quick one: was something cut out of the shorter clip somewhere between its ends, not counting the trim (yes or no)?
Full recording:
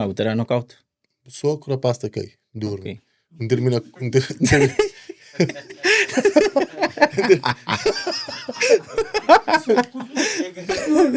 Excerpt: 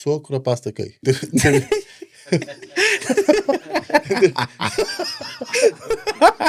yes